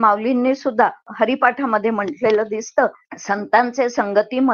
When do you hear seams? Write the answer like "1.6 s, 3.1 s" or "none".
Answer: 1.1 s, 3.1 s